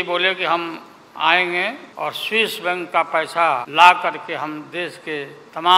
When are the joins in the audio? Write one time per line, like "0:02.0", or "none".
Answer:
0:01.9
0:03.7